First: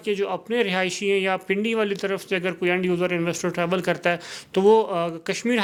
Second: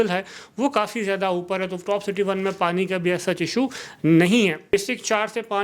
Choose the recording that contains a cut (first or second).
second